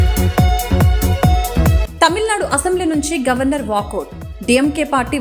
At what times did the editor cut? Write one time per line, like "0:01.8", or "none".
none